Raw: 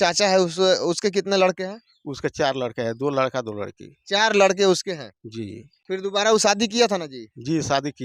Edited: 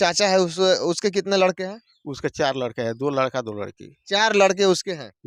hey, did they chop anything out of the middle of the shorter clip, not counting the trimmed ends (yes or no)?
no